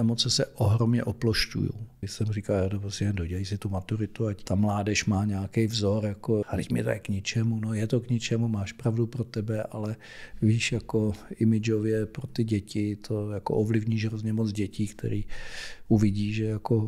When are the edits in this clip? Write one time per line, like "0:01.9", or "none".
0:02.0
0:04.4
0:06.4